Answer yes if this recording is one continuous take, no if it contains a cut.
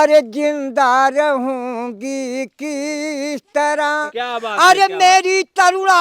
no